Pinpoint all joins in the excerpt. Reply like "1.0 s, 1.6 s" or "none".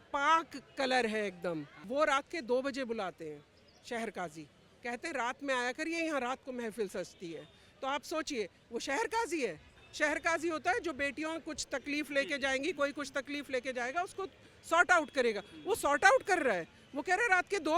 1.7 s, 9.8 s